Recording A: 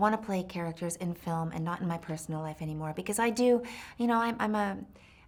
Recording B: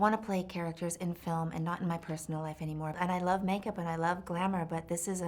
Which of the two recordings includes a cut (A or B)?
B